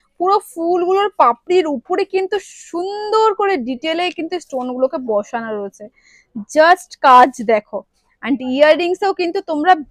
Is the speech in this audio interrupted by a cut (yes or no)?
no